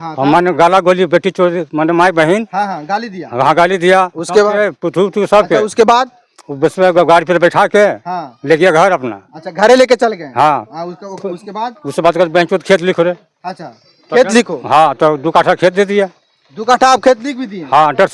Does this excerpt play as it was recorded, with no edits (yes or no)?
yes